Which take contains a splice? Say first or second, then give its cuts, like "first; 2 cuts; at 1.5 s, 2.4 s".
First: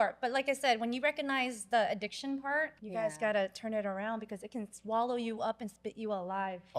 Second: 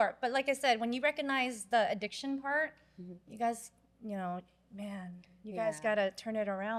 first; 1 cut; at 2.8 s